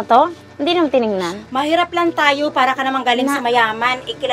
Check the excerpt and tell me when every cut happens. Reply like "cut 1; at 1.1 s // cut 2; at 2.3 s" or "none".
cut 1; at 1.4 s